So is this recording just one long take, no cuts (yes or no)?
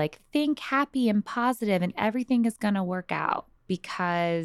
no